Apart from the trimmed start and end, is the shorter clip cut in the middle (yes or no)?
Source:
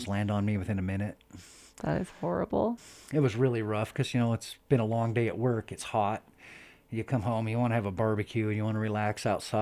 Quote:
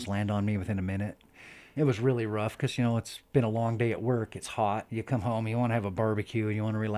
yes